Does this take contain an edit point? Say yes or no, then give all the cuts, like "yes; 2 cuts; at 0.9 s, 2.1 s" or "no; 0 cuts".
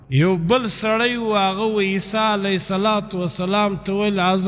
no; 0 cuts